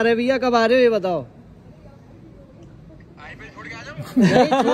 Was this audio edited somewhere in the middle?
no; 0 cuts

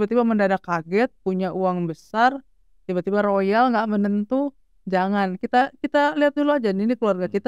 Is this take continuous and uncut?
yes; 0 cuts

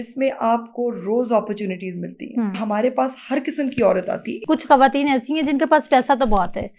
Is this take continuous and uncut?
no; 2 cuts; at 2.6 s, 4.3 s

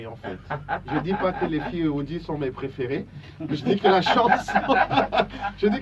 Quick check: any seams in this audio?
yes; 1 cut; at 3.5 s

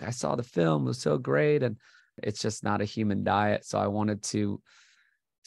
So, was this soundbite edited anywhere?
yes; 1 cut; at 2.2 s

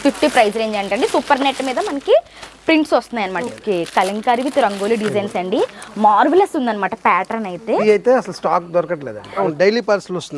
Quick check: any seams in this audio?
yes; 3 cuts; at 3.4 s, 7.8 s, 9.4 s

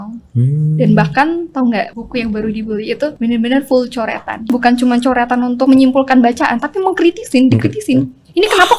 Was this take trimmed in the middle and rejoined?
yes; 4 cuts; at 1.9 s, 3.1 s, 4.5 s, 5.7 s

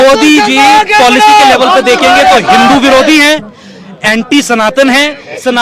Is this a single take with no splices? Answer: yes; 0 cuts

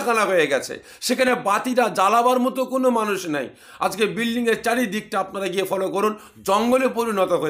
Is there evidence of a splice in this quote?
no; 0 cuts

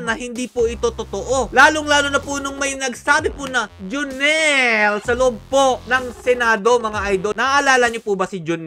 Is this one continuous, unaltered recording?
no; 1 cut; at 7.3 s

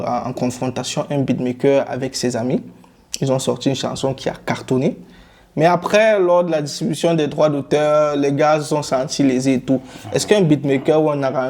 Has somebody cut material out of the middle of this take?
no; 0 cuts

